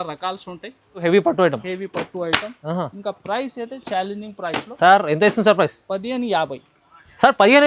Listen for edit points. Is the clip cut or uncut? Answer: cut